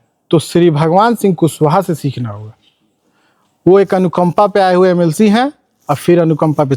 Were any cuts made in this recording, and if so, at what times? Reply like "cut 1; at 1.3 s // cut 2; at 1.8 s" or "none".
none